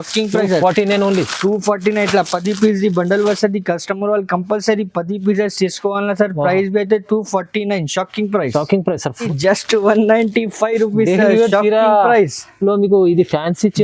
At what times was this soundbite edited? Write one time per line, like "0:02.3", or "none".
0:09.3